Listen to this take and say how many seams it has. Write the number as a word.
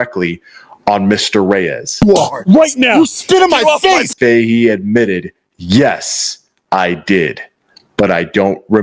one